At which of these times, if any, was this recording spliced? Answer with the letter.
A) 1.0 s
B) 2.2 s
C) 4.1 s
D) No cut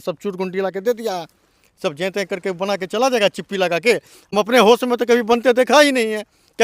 C